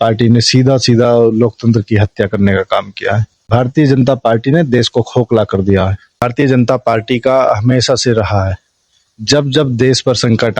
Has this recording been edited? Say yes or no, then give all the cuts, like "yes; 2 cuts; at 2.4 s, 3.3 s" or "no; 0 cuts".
yes; 2 cuts; at 3.4 s, 6.2 s